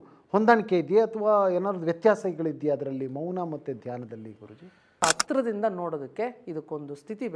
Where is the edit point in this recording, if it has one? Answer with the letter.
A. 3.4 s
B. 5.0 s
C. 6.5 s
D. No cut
B